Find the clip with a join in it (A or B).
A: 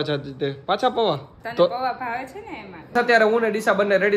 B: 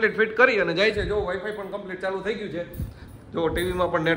A